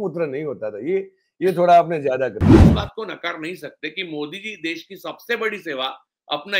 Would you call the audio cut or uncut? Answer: cut